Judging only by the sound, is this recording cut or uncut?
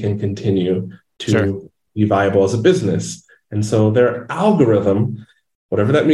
uncut